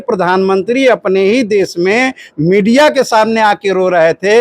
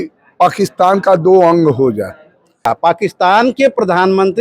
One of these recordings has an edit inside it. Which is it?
second; 1 cut; at 2.7 s

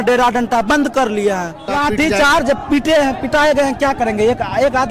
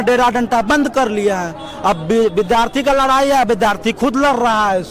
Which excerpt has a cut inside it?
first; 1 cut; at 1.7 s

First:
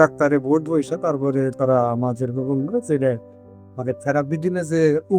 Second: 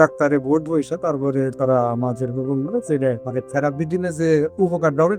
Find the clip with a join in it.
second; 1 cut; at 3.2 s

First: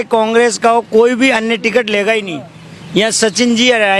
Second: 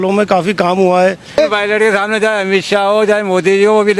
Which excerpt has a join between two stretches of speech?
second; 1 cut; at 1.4 s

